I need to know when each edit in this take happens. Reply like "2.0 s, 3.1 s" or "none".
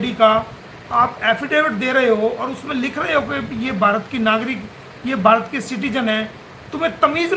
none